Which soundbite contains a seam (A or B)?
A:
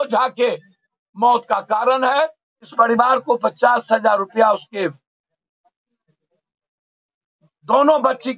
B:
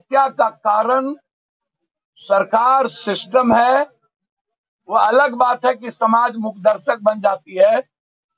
A